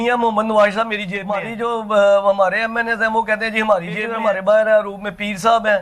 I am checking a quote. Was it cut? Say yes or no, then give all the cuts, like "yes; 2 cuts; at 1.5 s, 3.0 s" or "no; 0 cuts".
yes; 2 cuts; at 1.5 s, 4.0 s